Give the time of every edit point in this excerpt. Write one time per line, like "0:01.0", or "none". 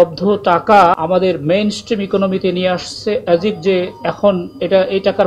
0:01.0

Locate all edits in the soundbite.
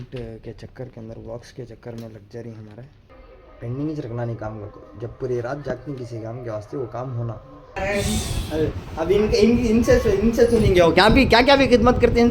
0:03.0
0:07.8

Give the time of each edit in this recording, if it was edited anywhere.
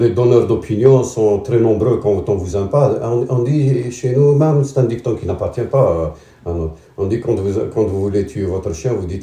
none

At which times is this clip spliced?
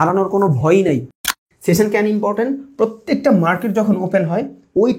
0:01.5

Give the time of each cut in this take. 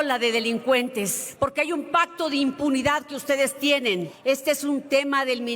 0:01.2
0:04.1

